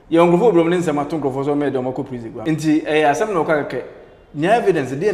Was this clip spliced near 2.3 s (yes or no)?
yes